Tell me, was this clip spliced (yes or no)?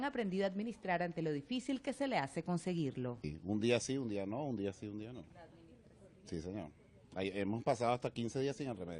no